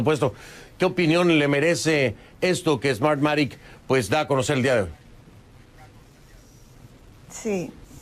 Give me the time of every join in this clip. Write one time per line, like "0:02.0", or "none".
0:05.6